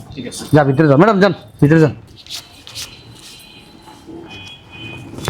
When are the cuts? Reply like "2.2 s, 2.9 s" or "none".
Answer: none